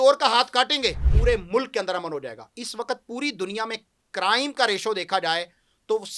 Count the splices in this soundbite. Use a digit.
1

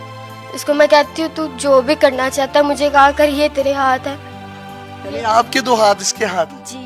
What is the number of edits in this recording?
0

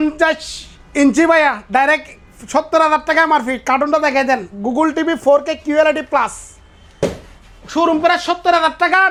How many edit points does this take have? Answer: 0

